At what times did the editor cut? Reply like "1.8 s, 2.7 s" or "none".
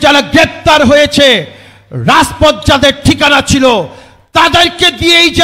none